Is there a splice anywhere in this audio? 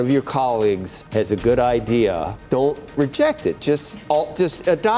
yes; 2 cuts; at 0.9 s, 2.3 s

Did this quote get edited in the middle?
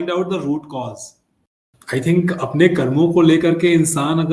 yes; 1 cut; at 1.7 s

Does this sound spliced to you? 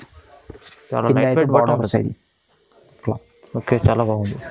yes; 1 cut; at 3.0 s

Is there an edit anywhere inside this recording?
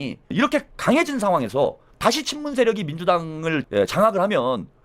yes; 2 cuts; at 1.9 s, 3.6 s

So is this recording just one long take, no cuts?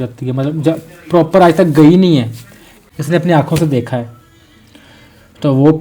no; 1 cut; at 2.8 s

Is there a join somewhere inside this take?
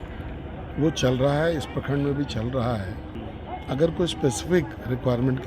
yes; 1 cut; at 3.1 s

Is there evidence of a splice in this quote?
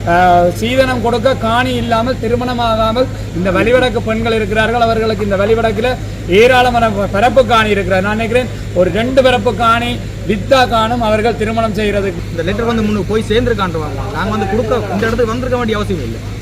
yes; 1 cut; at 12.1 s

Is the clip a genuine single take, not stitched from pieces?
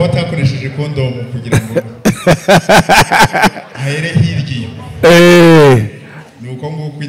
yes; 0 cuts

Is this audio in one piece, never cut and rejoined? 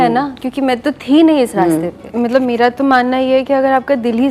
no; 1 cut; at 2.0 s

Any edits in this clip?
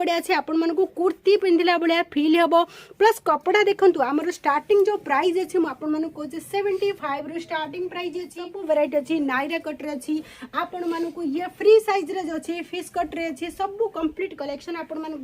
yes; 1 cut; at 8.4 s

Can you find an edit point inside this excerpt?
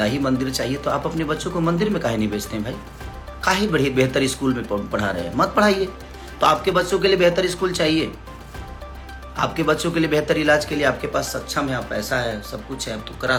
no; 0 cuts

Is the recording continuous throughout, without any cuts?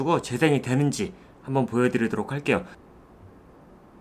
no; 1 cut; at 2.8 s

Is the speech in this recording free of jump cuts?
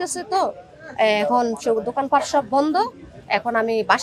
yes; 0 cuts

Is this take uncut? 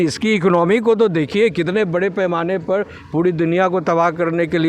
yes; 0 cuts

